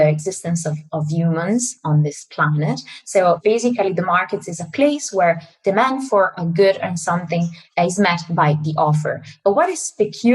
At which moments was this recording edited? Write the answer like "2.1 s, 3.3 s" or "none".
3.4 s, 7.6 s